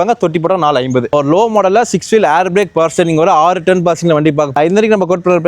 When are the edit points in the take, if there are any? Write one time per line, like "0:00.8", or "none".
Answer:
0:01.1
0:04.5